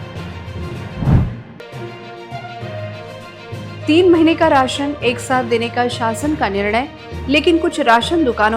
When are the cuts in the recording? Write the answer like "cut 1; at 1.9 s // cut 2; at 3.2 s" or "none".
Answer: cut 1; at 0.9 s